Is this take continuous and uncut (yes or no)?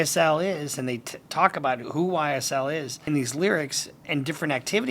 no